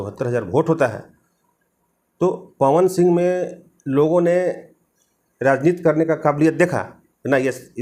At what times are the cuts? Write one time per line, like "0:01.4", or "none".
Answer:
none